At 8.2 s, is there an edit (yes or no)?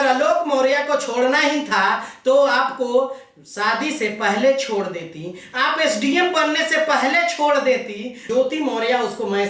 yes